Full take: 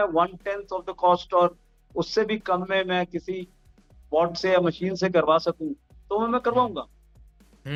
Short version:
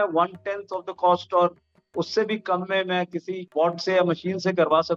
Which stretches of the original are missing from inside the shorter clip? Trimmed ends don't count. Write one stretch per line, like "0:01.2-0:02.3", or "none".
0:03.4-0:03.9